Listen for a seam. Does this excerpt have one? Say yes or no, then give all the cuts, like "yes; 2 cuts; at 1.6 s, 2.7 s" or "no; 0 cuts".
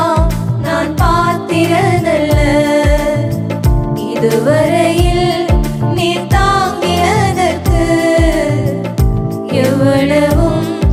no; 0 cuts